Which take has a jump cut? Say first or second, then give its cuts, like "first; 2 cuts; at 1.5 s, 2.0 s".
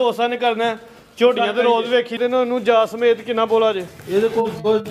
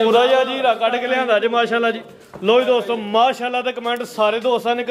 first; 1 cut; at 2.2 s